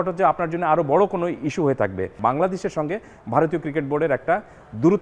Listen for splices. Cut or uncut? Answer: cut